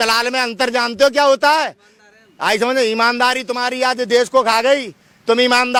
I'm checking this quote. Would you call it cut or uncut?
uncut